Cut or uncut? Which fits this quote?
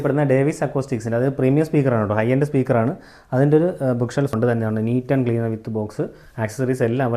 cut